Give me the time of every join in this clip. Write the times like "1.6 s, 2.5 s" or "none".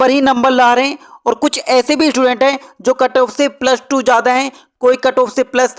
none